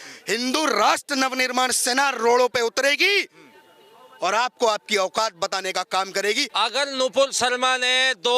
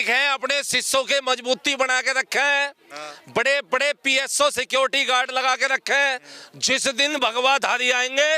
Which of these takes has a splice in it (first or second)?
first